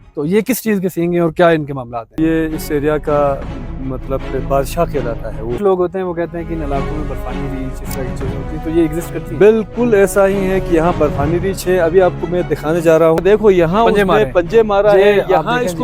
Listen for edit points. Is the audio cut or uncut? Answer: cut